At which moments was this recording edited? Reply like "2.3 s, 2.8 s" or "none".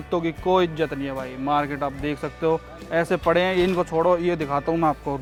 none